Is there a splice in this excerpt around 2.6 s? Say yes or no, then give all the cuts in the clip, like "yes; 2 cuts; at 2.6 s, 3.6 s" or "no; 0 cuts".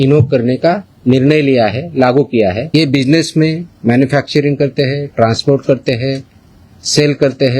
yes; 1 cut; at 2.6 s